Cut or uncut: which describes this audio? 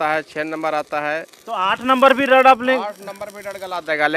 uncut